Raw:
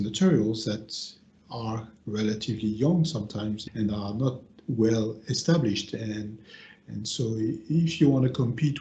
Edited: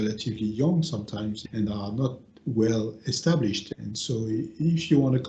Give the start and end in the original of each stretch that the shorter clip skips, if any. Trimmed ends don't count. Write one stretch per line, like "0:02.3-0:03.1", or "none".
0:05.9-0:06.8